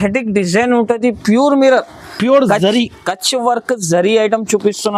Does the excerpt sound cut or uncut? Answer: uncut